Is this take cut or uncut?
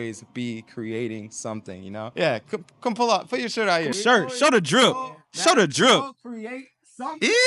uncut